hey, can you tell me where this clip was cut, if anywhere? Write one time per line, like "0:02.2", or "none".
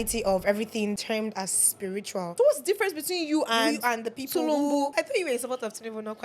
0:01.0
0:02.3
0:04.9